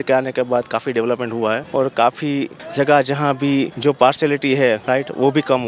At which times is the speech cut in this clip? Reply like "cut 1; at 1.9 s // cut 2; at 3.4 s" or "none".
cut 1; at 1.6 s // cut 2; at 2.6 s // cut 3; at 3.7 s // cut 4; at 4.8 s